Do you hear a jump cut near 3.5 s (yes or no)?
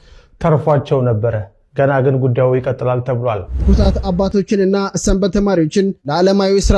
yes